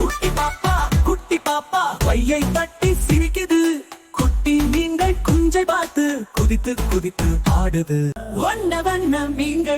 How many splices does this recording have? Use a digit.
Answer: 1